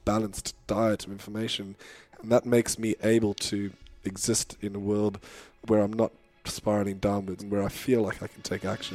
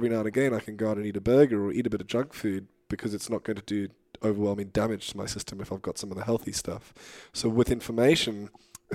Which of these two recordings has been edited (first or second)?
first